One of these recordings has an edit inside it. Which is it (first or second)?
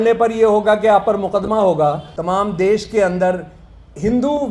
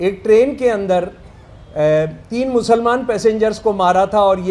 first